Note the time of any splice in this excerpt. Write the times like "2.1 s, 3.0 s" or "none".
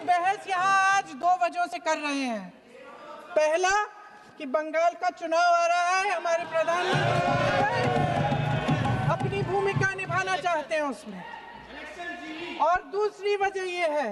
none